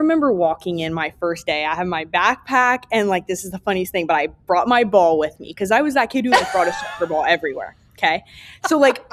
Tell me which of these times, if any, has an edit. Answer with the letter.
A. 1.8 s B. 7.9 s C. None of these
C